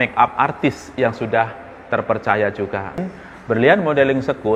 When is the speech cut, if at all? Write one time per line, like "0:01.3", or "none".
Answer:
0:03.0